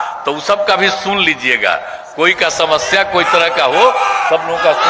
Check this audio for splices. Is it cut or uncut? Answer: uncut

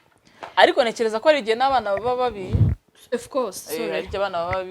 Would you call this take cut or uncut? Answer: uncut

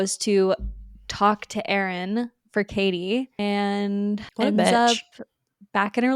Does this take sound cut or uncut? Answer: cut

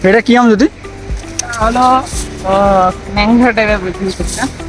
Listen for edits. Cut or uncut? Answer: uncut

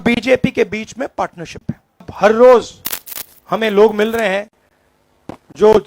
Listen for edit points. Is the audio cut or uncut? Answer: cut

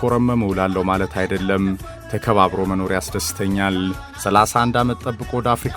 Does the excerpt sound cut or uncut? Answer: cut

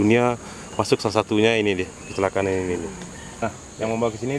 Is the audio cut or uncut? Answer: cut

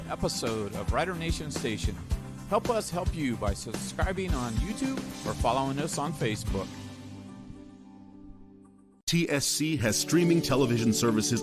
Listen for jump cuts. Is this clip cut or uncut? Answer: cut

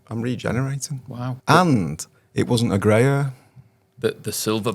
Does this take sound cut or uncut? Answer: cut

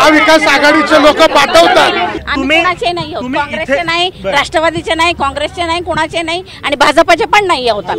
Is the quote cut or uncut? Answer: cut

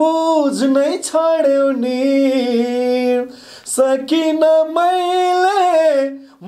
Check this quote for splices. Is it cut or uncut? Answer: uncut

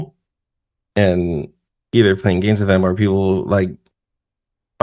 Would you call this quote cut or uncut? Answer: uncut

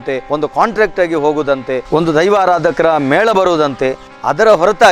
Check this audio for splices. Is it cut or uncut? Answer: cut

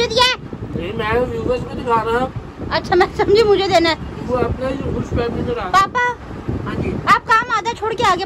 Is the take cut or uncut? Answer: uncut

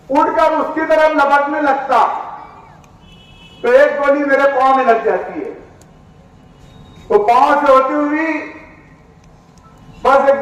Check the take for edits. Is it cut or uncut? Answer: uncut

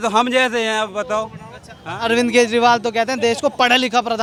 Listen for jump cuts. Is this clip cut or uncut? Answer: uncut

